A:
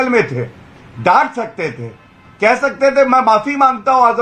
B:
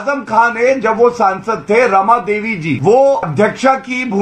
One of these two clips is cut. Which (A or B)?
B